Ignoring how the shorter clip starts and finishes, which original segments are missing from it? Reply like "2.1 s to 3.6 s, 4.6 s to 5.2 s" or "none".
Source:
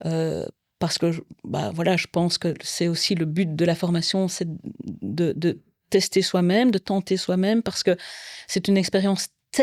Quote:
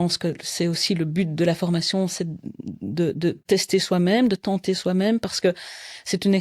5.6 s to 5.8 s